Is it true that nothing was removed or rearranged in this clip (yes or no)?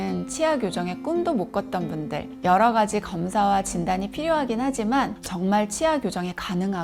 yes